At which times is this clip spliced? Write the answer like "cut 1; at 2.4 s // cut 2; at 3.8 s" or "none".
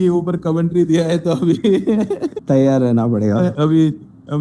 cut 1; at 2.3 s // cut 2; at 3.5 s